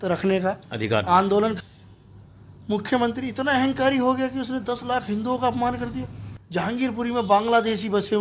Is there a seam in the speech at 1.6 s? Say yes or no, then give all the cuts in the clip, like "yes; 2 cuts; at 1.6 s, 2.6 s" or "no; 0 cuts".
yes; 1 cut; at 1.6 s